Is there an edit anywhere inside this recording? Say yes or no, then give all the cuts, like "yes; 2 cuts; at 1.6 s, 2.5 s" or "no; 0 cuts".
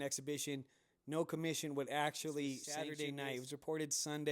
yes; 1 cut; at 2.9 s